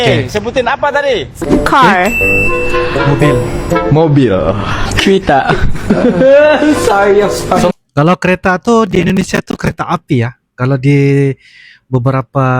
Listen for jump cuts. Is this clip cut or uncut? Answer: cut